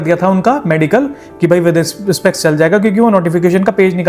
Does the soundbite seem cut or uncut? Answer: uncut